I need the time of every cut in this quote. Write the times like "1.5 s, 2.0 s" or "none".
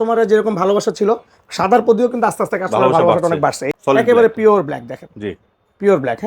3.6 s

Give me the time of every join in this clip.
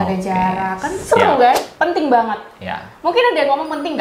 1.7 s

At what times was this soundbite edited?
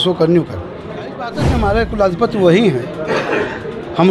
1.4 s

